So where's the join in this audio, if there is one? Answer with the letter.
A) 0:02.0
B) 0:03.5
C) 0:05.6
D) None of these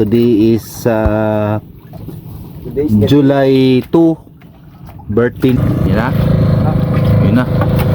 C